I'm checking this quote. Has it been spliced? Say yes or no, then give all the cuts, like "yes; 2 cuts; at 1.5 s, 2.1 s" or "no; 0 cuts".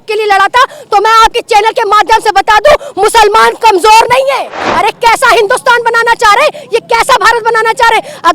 yes; 1 cut; at 4.7 s